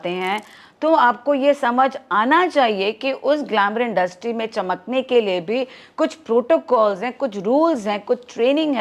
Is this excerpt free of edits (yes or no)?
yes